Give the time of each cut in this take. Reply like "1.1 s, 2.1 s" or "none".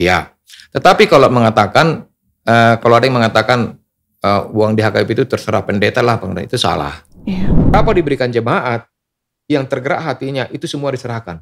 7.7 s